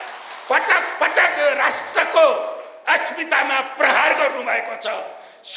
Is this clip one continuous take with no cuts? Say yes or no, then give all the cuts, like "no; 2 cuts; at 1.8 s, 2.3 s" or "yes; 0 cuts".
yes; 0 cuts